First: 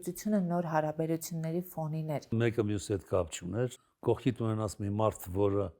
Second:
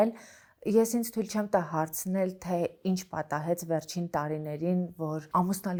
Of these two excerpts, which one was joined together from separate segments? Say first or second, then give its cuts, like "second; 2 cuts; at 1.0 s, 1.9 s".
first; 2 cuts; at 2.4 s, 3.9 s